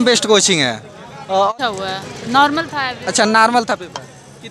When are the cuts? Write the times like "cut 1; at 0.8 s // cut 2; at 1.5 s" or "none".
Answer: cut 1; at 1.5 s